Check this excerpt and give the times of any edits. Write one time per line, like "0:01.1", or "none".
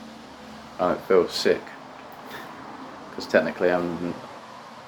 none